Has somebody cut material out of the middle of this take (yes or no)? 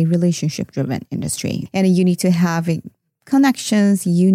yes